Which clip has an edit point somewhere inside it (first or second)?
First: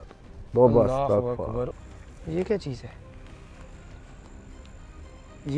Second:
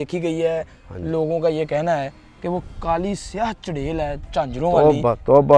first